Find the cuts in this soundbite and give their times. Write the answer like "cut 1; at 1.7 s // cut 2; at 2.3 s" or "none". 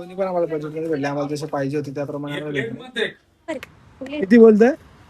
cut 1; at 3.5 s